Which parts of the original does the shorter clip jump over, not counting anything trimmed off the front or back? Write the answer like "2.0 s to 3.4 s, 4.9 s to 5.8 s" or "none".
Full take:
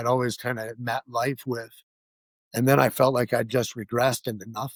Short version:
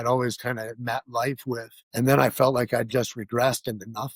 1.8 s to 2.4 s